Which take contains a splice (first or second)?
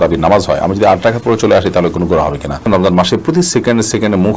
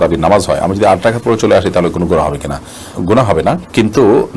first